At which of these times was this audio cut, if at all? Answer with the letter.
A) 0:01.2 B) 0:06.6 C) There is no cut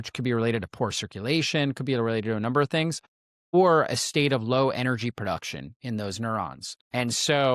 C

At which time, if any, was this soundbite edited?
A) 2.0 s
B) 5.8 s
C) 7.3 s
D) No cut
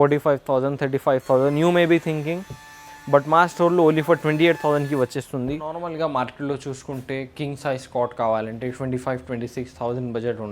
B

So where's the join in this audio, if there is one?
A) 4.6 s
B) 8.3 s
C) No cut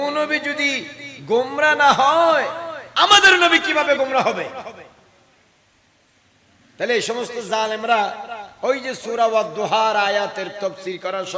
C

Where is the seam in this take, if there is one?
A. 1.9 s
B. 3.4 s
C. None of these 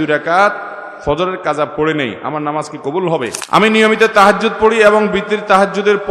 B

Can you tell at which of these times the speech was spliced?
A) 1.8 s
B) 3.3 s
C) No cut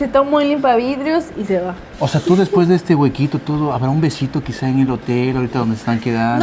A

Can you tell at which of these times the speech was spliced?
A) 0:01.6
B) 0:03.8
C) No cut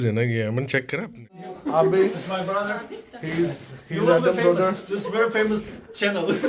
A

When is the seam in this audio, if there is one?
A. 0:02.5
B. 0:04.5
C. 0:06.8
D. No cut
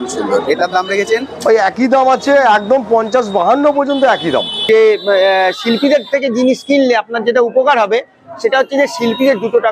B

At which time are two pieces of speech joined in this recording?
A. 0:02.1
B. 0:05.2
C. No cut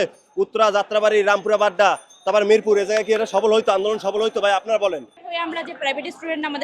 B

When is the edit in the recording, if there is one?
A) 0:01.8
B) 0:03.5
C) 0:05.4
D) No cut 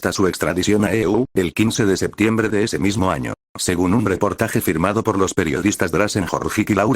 B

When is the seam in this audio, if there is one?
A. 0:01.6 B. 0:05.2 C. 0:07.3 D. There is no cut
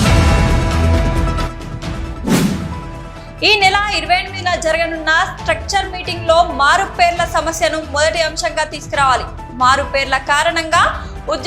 A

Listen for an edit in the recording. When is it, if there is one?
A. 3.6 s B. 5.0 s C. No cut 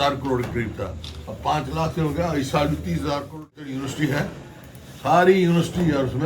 A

